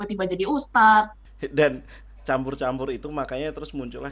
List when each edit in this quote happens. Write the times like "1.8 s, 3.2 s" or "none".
1.2 s